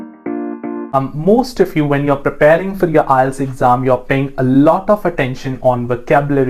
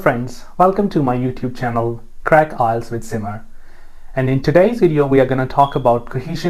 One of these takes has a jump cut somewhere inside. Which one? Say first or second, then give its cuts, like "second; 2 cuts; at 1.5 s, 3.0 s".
first; 1 cut; at 0.9 s